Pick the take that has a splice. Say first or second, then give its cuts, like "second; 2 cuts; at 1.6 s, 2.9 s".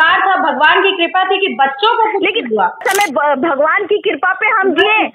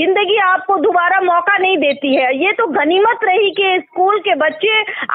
first; 1 cut; at 2.8 s